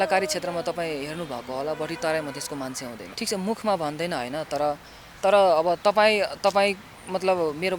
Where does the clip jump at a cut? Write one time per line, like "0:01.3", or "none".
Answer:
0:03.0